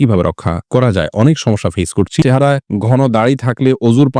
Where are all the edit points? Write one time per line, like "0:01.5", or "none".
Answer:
0:02.2